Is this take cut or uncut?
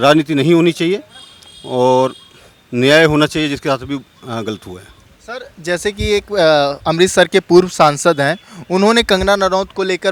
uncut